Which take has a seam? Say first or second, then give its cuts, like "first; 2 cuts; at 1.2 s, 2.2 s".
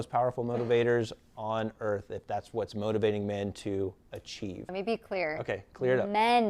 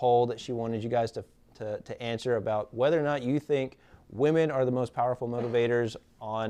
first; 1 cut; at 4.6 s